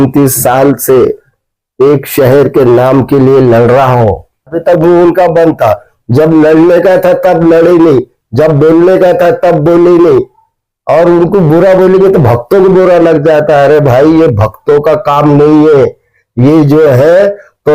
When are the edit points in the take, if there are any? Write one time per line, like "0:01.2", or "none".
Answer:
0:04.6